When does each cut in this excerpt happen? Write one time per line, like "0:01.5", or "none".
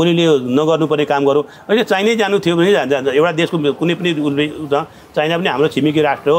none